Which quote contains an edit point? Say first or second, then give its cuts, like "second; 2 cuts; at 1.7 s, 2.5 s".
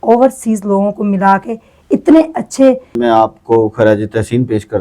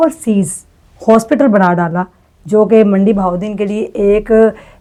first; 1 cut; at 3.0 s